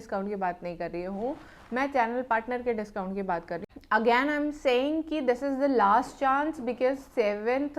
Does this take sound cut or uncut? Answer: cut